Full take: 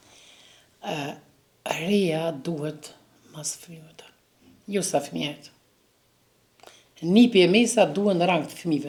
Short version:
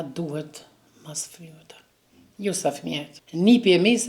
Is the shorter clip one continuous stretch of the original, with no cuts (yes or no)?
no